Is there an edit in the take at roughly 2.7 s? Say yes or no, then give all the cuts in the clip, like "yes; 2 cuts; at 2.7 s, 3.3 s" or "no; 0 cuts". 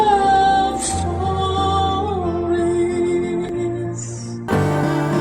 no; 1 cut; at 4.3 s